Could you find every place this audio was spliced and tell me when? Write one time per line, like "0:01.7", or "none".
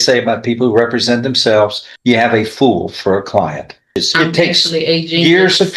0:01.9
0:04.0